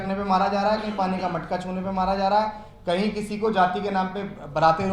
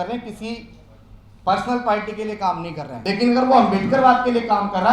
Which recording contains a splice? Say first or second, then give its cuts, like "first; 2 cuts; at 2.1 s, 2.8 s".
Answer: second; 1 cut; at 2.9 s